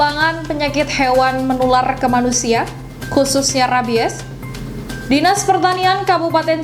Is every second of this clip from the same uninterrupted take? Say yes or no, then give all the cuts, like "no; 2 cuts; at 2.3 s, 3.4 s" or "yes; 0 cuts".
yes; 0 cuts